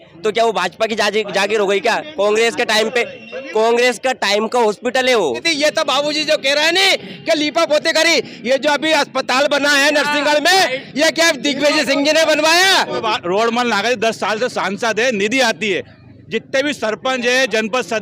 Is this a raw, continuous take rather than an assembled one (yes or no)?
no